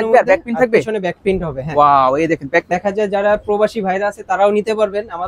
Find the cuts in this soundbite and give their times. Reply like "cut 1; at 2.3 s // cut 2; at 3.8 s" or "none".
cut 1; at 2.7 s